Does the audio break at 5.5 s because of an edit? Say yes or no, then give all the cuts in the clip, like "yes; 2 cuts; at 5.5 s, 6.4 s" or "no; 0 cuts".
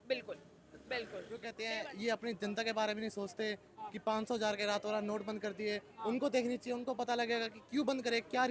no; 1 cut; at 1.6 s